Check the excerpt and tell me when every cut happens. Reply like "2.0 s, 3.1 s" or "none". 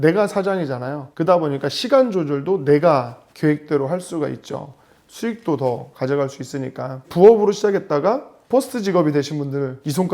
5.0 s, 7.0 s